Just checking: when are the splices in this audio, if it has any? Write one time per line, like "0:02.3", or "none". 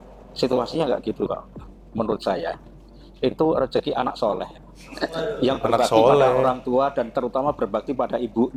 none